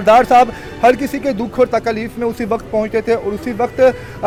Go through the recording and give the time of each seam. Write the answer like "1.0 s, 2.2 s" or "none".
none